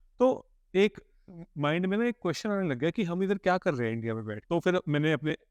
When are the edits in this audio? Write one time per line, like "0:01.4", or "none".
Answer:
0:04.3